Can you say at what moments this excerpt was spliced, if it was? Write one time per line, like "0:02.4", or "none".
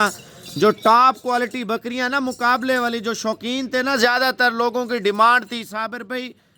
none